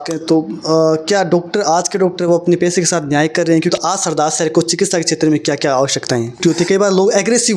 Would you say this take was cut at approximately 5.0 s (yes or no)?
no